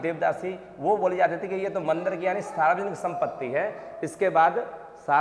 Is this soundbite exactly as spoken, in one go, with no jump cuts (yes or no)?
yes